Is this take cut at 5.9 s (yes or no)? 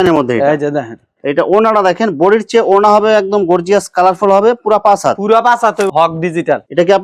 yes